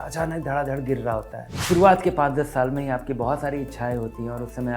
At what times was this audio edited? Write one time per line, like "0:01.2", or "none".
0:01.5